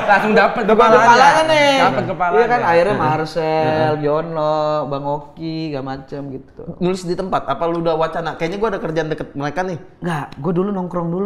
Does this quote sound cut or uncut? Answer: uncut